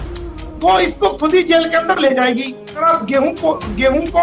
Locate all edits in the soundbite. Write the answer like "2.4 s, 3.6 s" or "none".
2.8 s